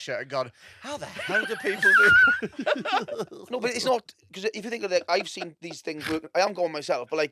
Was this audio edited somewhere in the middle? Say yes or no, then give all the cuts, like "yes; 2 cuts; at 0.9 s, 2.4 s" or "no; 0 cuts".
no; 0 cuts